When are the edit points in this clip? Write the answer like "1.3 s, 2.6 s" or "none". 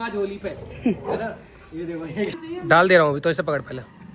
2.3 s